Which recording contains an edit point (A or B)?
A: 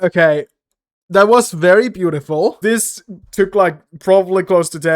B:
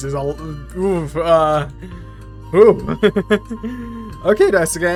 A